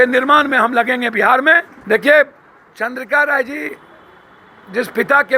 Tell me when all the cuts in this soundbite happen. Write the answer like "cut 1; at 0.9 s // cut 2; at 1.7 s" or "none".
cut 1; at 1.7 s